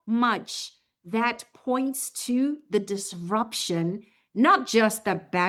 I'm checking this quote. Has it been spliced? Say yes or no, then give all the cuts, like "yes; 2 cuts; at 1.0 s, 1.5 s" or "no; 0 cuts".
no; 0 cuts